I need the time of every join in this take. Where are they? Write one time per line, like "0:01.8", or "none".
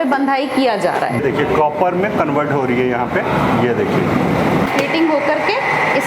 0:01.2
0:04.7